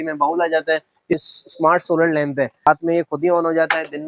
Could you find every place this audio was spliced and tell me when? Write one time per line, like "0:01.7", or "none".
0:01.2
0:02.7